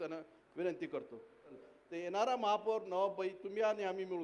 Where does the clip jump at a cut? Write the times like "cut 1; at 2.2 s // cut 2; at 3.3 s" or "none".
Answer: cut 1; at 1.6 s